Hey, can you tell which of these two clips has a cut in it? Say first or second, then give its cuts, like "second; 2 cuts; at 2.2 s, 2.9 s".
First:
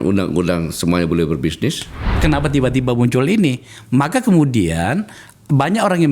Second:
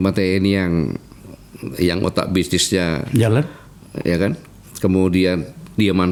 first; 1 cut; at 2.2 s